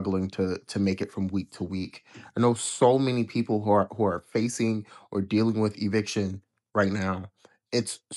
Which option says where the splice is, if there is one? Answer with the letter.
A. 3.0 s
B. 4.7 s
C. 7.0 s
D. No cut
D